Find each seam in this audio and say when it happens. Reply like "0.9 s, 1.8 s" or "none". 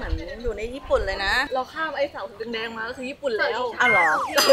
1.4 s

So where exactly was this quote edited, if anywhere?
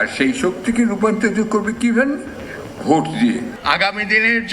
3.5 s

